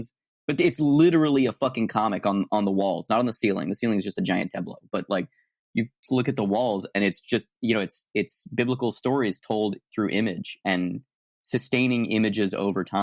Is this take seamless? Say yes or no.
yes